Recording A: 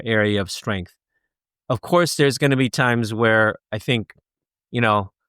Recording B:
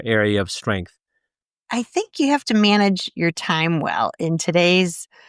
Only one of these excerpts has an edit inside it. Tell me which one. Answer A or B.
B